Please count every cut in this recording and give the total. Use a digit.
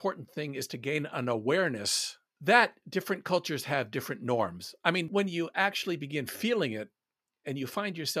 1